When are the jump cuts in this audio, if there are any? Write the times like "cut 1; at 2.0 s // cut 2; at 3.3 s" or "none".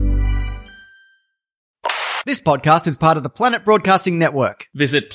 cut 1; at 1.6 s